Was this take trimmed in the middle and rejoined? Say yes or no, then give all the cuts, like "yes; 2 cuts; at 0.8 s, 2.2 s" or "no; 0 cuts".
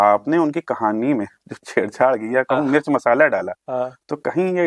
no; 0 cuts